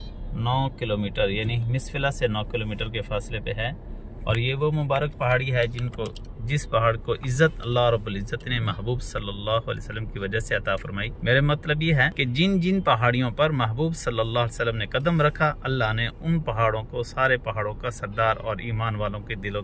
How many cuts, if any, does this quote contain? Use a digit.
0